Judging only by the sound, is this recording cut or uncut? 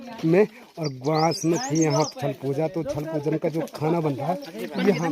uncut